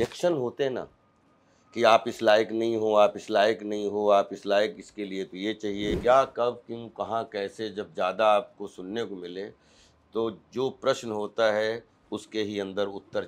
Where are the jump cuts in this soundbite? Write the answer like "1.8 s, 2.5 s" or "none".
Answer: 5.9 s